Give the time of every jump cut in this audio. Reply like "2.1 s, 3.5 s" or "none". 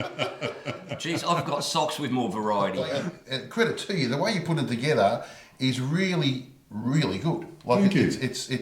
3.1 s